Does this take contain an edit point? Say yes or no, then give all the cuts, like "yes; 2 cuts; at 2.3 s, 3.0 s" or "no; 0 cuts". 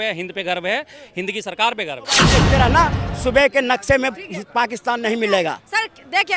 yes; 1 cut; at 2.3 s